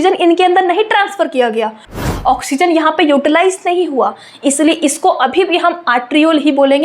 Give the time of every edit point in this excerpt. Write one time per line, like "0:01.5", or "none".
0:01.8